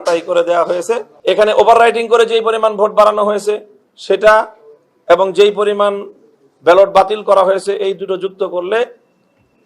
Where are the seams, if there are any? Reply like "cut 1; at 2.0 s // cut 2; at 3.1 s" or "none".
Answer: cut 1; at 1.1 s